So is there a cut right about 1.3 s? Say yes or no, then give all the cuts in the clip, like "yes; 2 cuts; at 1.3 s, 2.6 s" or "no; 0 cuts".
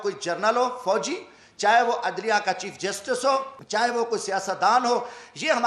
no; 1 cut; at 3.6 s